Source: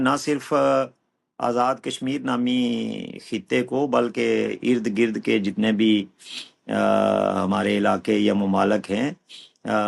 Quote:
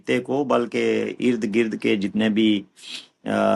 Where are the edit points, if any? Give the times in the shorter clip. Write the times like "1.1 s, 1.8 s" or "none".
none